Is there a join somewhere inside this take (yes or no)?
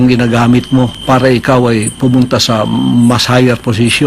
yes